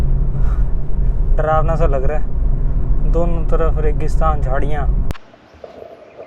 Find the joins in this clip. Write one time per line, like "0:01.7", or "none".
0:05.1